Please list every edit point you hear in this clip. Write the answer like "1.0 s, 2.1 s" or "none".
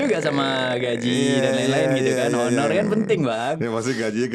none